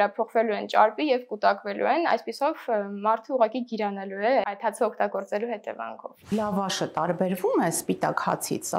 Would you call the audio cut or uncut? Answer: cut